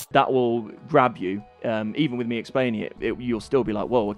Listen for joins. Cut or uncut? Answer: uncut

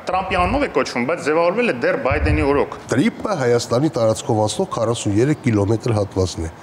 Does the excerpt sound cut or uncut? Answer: cut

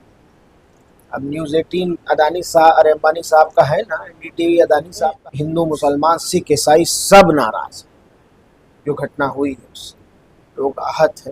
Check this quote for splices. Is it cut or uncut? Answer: cut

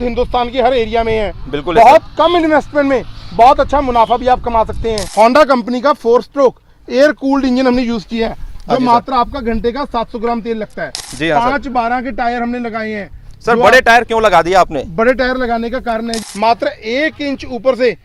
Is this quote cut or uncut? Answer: cut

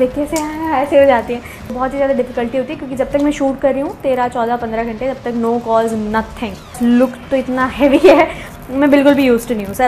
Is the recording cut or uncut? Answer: cut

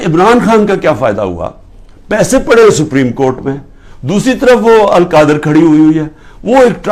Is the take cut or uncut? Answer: uncut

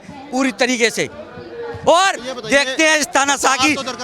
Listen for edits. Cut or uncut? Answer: uncut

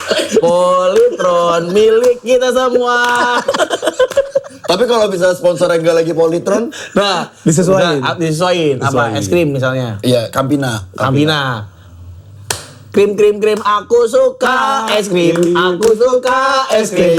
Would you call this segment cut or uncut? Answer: uncut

